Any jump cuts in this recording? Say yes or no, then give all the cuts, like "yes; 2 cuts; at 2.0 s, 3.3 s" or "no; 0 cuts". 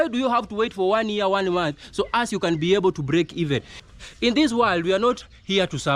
yes; 1 cut; at 3.7 s